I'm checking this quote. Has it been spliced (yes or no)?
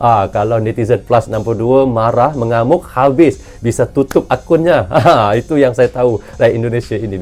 no